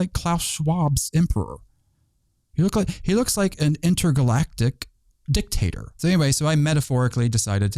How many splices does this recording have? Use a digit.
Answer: 1